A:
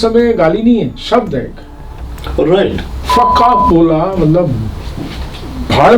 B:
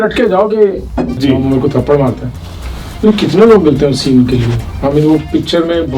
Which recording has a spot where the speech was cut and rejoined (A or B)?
B